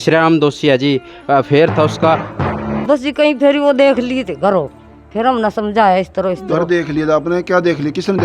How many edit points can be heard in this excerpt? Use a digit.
1